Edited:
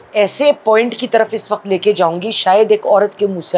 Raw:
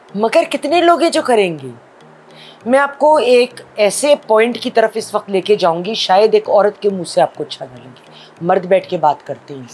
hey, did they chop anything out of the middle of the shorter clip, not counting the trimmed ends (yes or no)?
no